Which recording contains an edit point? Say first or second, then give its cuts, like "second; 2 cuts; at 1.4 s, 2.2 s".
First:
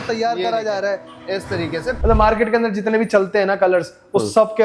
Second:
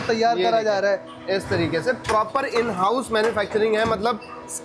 first; 1 cut; at 2.0 s